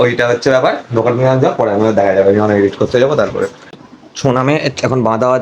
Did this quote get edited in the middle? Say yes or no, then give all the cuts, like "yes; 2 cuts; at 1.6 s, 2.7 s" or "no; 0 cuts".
yes; 1 cut; at 3.8 s